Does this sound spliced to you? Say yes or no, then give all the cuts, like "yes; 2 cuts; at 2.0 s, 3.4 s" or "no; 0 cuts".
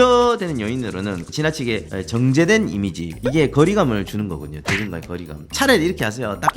yes; 2 cuts; at 1.2 s, 5.5 s